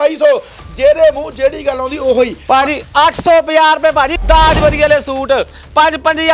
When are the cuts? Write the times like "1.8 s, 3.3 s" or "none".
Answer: 4.2 s